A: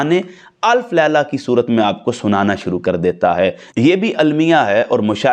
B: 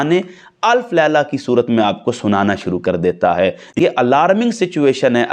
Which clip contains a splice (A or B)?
B